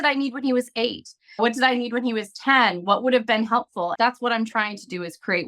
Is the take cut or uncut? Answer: cut